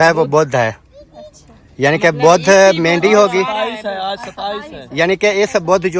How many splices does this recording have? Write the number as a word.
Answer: zero